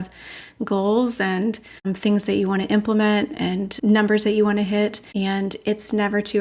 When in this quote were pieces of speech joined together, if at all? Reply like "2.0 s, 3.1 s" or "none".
1.9 s, 3.7 s, 5.0 s

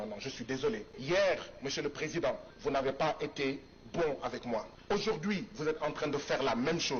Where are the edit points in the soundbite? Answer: 0.9 s, 2.5 s, 4.7 s

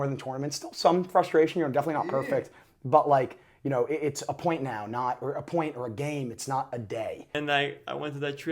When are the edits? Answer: 7.3 s

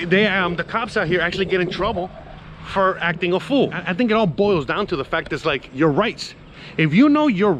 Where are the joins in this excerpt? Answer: 3.8 s

